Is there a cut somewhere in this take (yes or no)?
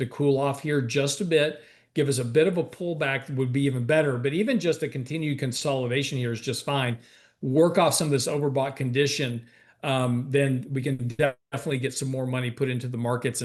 no